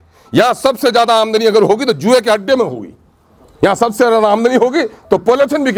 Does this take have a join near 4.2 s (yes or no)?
no